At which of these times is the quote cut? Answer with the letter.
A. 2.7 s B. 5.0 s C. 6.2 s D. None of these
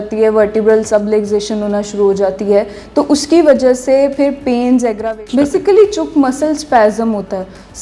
B